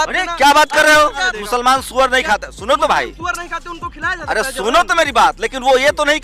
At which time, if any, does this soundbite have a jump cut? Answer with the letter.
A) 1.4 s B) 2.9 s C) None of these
A